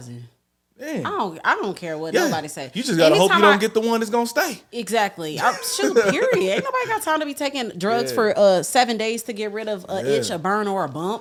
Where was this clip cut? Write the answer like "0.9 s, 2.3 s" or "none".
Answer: none

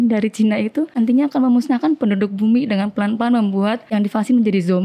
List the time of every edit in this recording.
0.9 s, 3.8 s

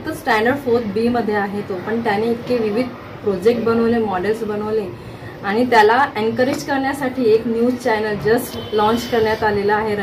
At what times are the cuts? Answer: none

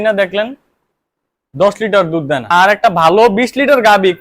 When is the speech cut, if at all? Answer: 2.4 s

